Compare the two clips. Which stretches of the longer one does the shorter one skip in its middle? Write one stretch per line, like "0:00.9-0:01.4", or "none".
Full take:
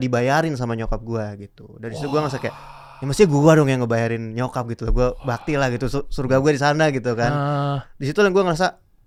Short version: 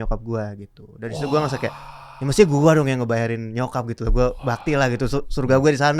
none